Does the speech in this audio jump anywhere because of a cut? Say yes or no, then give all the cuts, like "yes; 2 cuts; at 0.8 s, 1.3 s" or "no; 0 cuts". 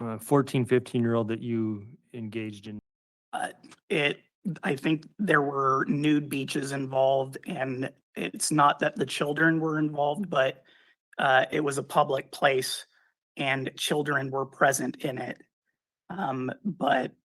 yes; 1 cut; at 2.7 s